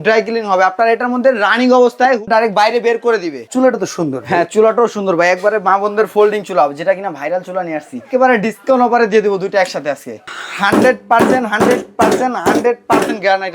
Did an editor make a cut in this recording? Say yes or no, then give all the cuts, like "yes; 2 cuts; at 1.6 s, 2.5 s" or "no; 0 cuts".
yes; 4 cuts; at 2.2 s, 3.4 s, 8.0 s, 10.3 s